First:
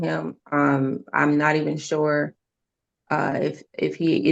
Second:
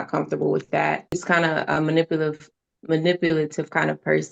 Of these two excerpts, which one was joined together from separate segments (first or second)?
second